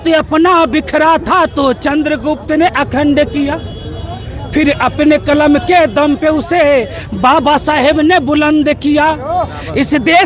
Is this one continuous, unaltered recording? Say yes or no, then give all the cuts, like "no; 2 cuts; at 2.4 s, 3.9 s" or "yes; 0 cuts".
yes; 0 cuts